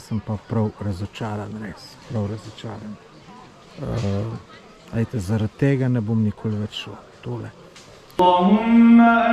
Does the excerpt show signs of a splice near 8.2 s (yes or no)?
yes